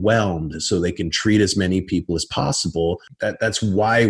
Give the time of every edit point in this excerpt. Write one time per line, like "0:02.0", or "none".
0:03.1